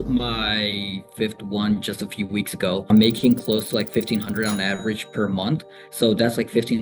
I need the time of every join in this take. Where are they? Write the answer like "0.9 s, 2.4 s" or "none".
2.9 s, 5.8 s